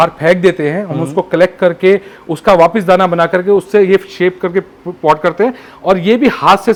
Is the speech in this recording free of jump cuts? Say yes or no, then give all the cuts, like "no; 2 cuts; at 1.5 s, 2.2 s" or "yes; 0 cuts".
yes; 0 cuts